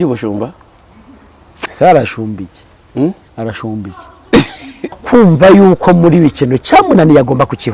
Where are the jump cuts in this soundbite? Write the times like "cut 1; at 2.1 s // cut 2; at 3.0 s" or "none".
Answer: cut 1; at 5.0 s